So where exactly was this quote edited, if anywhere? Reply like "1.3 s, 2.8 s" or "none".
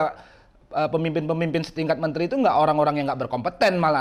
none